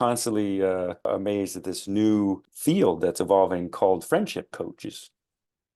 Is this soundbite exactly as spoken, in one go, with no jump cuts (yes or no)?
no